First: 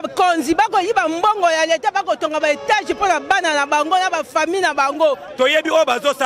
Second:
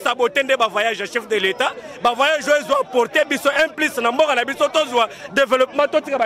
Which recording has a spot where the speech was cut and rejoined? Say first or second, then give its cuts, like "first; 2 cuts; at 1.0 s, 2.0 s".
first; 1 cut; at 5.3 s